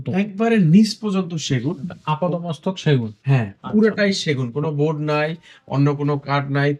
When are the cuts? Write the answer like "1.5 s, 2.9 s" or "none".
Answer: none